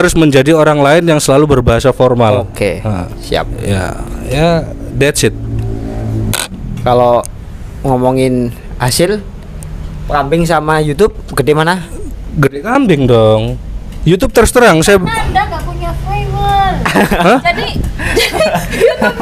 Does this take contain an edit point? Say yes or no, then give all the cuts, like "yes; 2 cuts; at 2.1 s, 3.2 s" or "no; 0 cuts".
no; 0 cuts